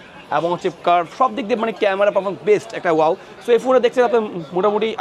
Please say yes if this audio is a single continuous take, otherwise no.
yes